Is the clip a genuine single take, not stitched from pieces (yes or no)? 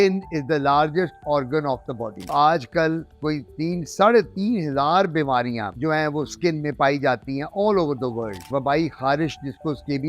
no